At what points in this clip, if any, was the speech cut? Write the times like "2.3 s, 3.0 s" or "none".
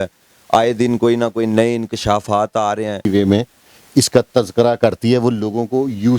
3.1 s